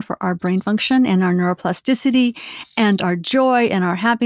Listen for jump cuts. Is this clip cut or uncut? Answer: uncut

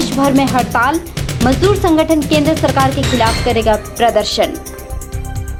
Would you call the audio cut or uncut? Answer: uncut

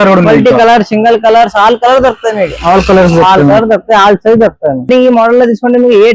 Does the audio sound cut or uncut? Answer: cut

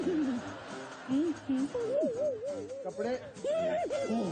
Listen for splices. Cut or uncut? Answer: uncut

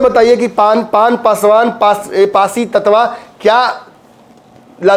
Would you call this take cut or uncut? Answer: uncut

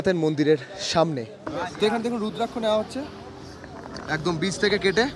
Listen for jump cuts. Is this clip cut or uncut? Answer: cut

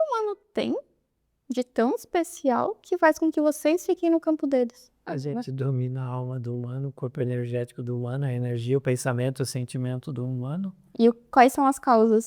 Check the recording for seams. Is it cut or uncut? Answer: cut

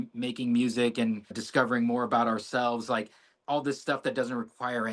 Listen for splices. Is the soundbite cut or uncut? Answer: cut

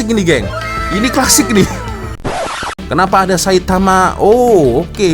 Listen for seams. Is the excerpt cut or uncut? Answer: cut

